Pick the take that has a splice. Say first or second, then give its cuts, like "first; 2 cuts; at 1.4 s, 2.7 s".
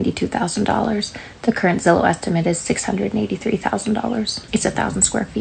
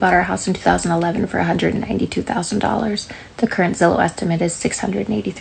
first; 1 cut; at 4.4 s